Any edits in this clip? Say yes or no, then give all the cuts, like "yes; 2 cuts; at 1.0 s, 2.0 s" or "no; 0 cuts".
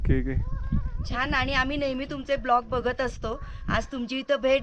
no; 0 cuts